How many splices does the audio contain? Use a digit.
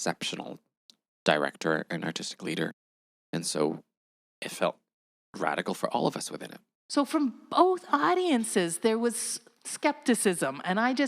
2